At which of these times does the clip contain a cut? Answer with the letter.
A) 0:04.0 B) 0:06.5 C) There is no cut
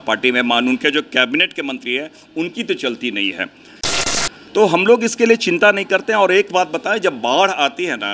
A